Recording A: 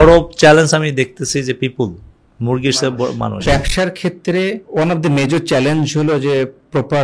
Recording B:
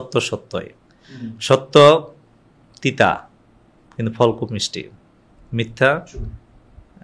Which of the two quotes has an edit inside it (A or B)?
A